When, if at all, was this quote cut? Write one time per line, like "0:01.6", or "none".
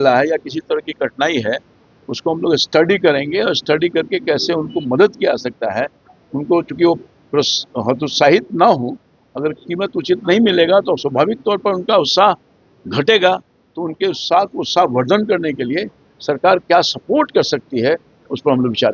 none